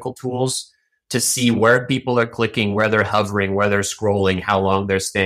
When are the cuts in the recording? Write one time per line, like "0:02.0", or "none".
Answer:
none